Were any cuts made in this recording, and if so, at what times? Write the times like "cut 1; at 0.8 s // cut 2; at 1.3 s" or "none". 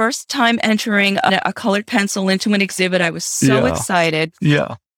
cut 1; at 1.3 s